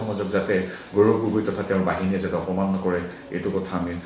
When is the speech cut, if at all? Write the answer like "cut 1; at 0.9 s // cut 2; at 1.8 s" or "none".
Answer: none